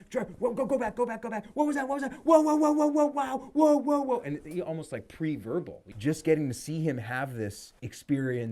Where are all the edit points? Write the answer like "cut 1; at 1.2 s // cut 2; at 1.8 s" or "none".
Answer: cut 1; at 5.8 s

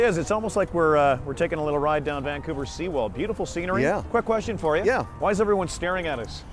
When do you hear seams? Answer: none

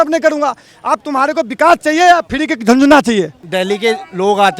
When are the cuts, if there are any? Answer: cut 1; at 3.4 s

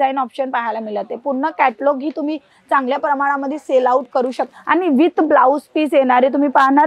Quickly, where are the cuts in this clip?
cut 1; at 4.5 s

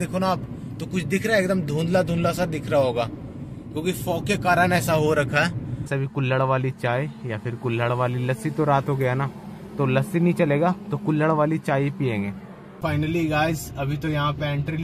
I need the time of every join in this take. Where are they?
cut 1; at 5.9 s // cut 2; at 12.8 s

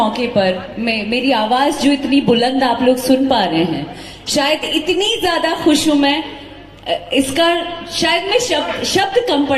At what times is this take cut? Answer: none

